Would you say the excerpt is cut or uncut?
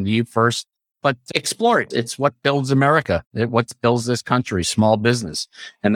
cut